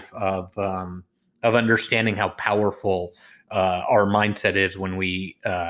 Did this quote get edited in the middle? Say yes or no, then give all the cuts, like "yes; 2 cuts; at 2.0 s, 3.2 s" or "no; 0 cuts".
no; 0 cuts